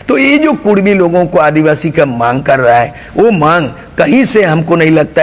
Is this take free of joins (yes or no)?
yes